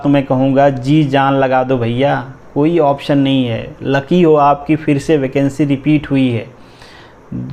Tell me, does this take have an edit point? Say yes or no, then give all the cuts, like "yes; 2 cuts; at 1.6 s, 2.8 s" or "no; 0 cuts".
no; 0 cuts